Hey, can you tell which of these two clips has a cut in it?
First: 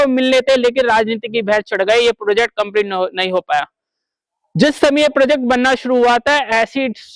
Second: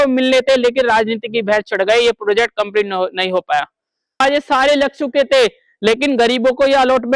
second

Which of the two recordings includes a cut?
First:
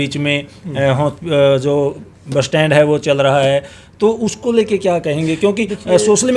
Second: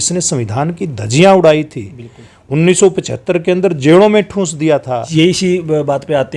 second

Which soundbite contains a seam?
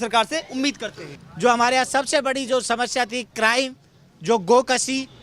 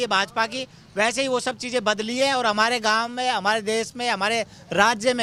first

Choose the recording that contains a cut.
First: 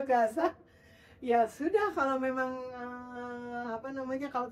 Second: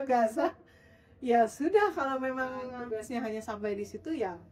second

